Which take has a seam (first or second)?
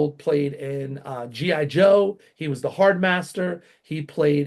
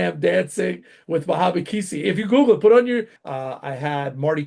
second